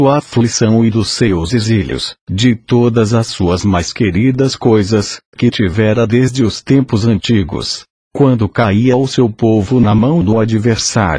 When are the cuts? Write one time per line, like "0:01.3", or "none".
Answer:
none